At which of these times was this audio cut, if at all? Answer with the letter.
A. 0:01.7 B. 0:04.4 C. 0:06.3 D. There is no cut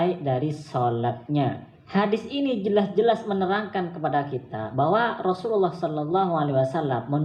A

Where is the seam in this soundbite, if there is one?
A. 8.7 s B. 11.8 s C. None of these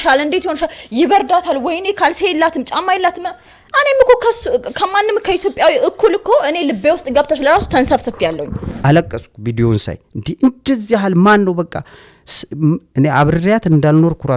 A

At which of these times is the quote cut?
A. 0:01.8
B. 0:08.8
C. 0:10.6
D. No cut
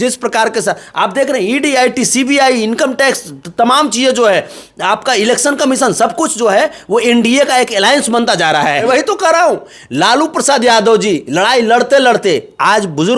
B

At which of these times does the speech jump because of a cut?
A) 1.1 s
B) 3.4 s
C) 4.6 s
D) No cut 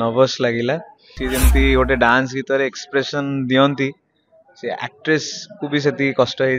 A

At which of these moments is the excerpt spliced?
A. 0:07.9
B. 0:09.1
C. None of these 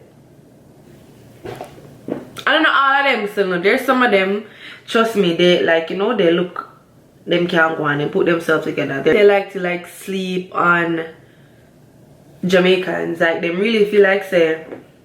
B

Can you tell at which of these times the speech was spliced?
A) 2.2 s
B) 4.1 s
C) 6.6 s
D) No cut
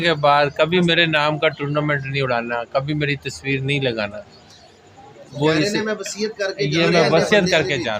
D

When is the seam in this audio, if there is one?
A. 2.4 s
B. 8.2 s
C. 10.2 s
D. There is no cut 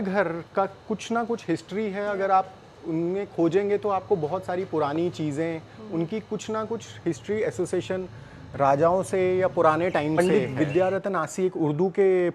C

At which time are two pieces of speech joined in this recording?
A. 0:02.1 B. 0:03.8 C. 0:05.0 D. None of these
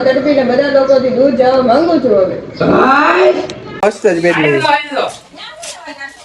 B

